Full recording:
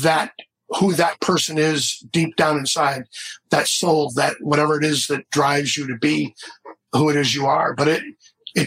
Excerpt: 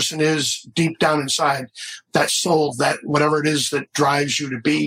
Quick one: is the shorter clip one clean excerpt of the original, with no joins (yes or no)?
yes